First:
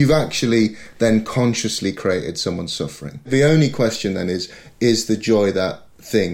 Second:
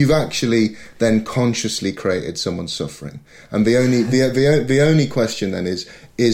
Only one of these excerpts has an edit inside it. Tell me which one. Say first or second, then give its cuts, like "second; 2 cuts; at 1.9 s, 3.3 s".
first; 1 cut; at 3.3 s